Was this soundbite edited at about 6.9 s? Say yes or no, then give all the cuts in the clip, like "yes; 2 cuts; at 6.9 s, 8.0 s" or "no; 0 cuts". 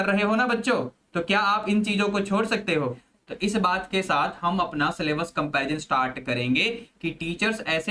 no; 1 cut; at 3.1 s